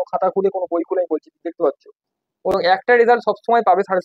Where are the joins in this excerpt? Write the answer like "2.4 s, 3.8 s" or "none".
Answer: 2.5 s